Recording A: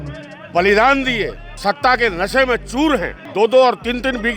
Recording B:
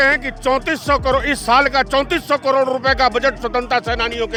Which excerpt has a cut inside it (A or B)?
A